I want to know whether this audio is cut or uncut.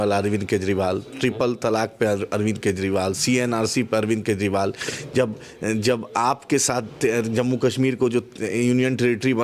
uncut